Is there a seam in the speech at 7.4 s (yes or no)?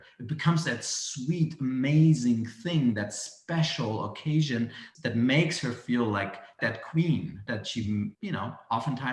yes